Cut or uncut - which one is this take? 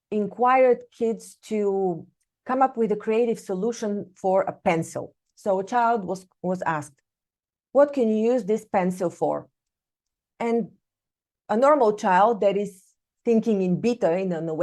uncut